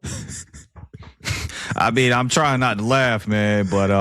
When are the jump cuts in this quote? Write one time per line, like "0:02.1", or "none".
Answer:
none